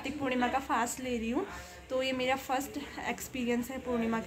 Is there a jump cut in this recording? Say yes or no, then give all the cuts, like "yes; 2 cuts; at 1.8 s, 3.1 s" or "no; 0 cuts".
no; 0 cuts